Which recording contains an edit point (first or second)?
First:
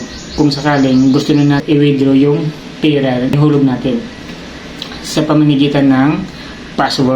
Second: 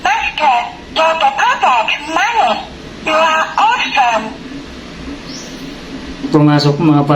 first